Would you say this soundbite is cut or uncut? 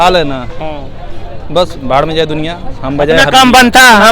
uncut